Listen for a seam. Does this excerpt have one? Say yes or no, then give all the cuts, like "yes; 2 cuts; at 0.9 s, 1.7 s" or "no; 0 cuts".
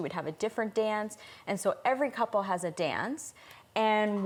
no; 0 cuts